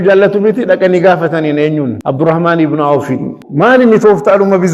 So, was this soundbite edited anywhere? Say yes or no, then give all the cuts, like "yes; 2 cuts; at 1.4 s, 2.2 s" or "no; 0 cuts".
yes; 2 cuts; at 2.0 s, 3.4 s